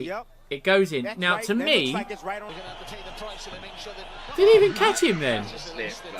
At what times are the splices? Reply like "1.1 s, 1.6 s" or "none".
2.5 s